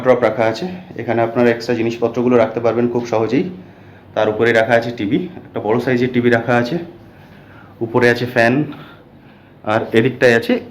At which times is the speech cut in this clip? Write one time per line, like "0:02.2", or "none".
none